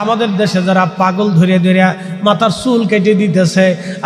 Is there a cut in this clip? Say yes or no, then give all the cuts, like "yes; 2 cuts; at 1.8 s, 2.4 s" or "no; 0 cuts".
no; 0 cuts